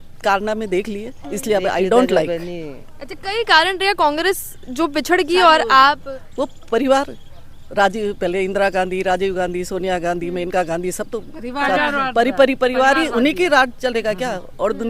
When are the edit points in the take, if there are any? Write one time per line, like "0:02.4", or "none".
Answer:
none